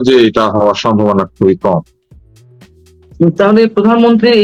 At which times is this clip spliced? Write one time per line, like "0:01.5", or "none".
none